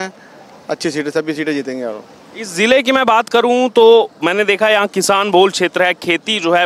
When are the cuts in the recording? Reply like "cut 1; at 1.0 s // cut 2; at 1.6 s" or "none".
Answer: none

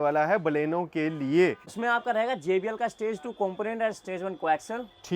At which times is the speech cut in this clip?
cut 1; at 1.7 s

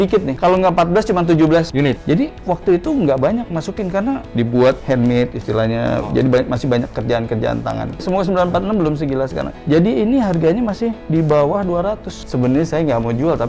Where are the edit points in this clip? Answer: cut 1; at 2.0 s // cut 2; at 4.3 s // cut 3; at 8.0 s // cut 4; at 12.1 s

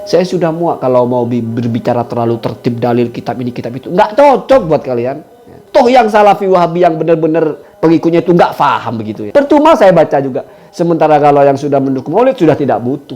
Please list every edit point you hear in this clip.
cut 1; at 5.8 s // cut 2; at 9.3 s

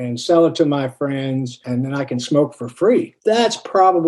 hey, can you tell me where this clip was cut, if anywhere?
cut 1; at 1.6 s // cut 2; at 3.1 s

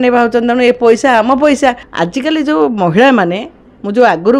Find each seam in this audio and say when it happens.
cut 1; at 1.9 s

